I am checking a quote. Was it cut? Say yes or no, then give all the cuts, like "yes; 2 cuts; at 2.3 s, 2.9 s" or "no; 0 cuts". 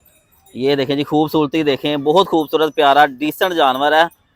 no; 0 cuts